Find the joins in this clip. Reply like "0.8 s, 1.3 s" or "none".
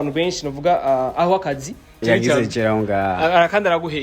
2.0 s

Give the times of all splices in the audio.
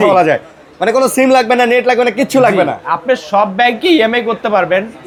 none

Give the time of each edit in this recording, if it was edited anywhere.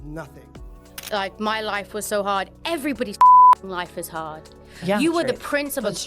0.9 s

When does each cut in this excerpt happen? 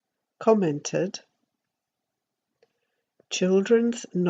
none

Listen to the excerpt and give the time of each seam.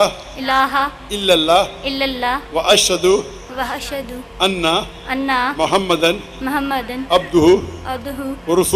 none

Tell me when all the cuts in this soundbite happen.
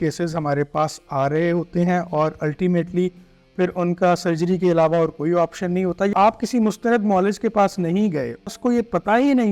6.1 s, 8.5 s

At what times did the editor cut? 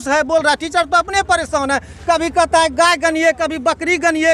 none

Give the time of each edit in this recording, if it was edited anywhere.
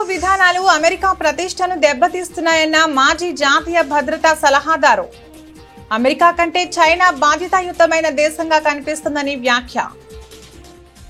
none

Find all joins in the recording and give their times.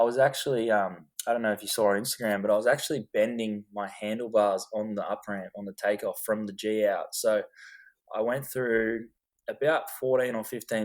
none

